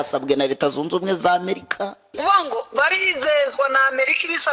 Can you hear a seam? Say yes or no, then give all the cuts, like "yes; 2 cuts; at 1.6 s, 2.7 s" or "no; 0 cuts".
yes; 1 cut; at 2.0 s